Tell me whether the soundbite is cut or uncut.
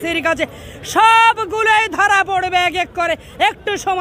uncut